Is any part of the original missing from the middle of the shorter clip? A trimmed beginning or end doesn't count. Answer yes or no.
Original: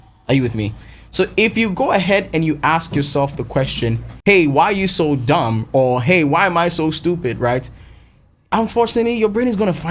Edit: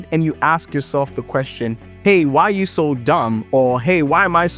no